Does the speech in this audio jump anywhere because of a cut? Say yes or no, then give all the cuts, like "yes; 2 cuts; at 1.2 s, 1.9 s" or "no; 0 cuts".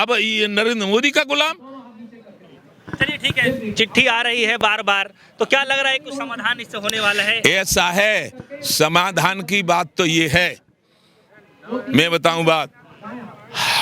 no; 0 cuts